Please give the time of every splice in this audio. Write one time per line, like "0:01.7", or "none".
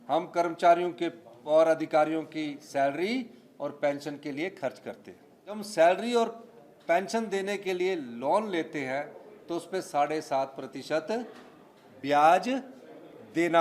0:05.6